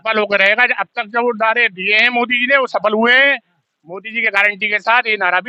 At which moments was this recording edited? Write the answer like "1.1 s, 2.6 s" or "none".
none